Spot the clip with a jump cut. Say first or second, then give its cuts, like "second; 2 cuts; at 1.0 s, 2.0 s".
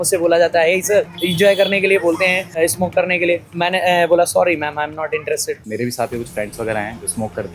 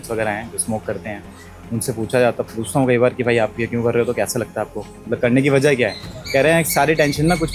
first; 4 cuts; at 1.2 s, 2.6 s, 3.5 s, 5.6 s